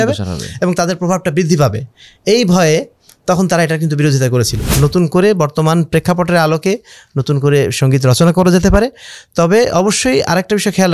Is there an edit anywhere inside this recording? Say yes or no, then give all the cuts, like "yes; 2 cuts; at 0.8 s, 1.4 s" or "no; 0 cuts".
yes; 1 cut; at 4.6 s